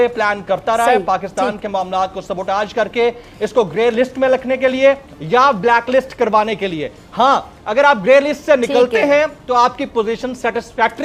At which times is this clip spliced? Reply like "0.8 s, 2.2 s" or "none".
none

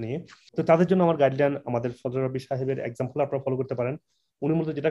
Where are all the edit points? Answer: none

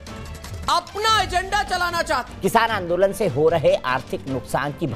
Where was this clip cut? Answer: 2.3 s

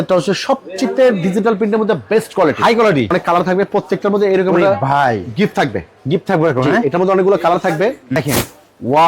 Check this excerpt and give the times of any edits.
3.1 s, 8.2 s

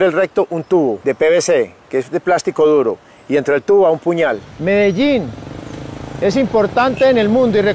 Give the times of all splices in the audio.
1.0 s, 4.5 s

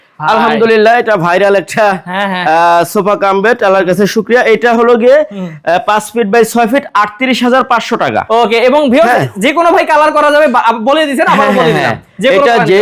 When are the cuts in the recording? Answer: none

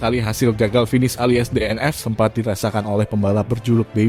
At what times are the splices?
none

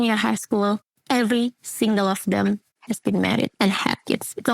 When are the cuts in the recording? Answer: none

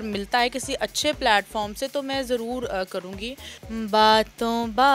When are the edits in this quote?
3.5 s

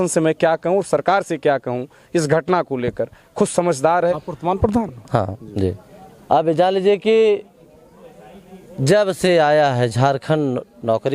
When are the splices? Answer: 4.2 s

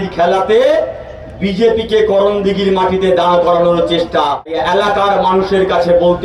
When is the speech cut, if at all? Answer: none

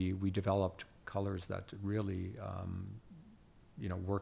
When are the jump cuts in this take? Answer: 1.0 s

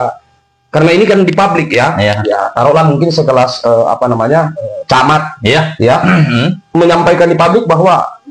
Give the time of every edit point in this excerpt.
none

